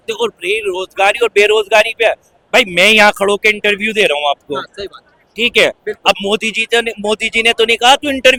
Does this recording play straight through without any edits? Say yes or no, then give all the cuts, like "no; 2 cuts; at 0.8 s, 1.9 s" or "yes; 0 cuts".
yes; 0 cuts